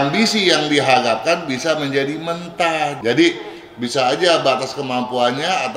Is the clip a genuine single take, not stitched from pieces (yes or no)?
no